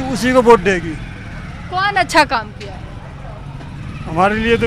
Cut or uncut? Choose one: uncut